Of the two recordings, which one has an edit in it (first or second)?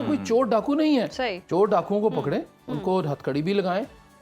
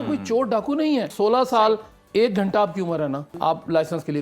second